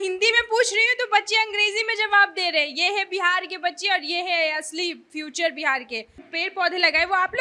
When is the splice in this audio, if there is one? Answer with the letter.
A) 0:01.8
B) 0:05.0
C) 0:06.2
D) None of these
C